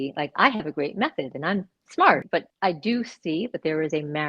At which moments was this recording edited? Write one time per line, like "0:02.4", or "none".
0:02.4